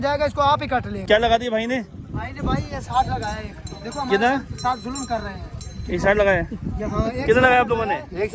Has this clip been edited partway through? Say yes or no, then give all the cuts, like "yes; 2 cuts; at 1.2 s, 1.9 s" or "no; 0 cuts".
yes; 1 cut; at 0.9 s